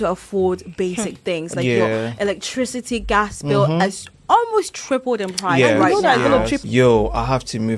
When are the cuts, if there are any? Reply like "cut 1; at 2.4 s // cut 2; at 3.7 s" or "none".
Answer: cut 1; at 6.6 s

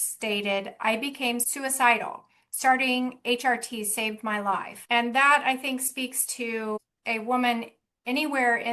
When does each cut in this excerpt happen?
cut 1; at 1.5 s // cut 2; at 4.7 s // cut 3; at 6.9 s

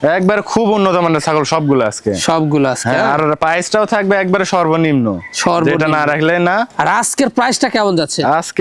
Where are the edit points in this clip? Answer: cut 1; at 6.7 s

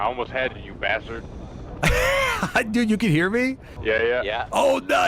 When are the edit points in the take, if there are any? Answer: cut 1; at 3.7 s

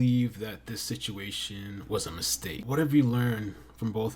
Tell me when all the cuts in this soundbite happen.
cut 1; at 2.6 s

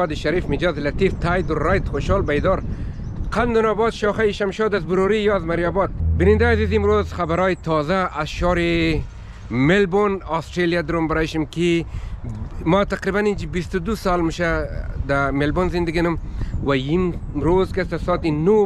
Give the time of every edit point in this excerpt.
cut 1; at 6.0 s

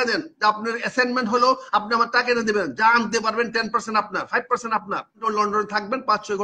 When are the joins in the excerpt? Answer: cut 1; at 5.2 s

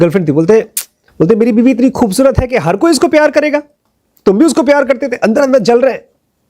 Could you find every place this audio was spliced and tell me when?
cut 1; at 1.0 s

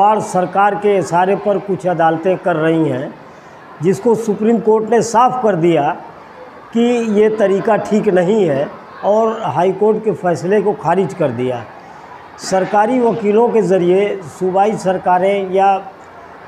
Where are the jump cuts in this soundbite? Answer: none

